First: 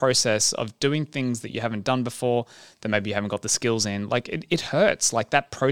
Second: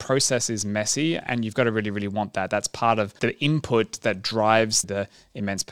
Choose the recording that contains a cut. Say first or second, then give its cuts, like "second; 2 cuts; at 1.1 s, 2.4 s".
second; 3 cuts; at 1.2 s, 3.1 s, 4.8 s